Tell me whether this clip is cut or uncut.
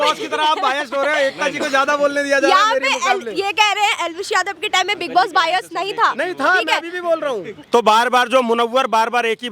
cut